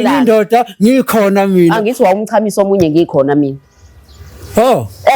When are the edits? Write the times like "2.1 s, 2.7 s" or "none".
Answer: none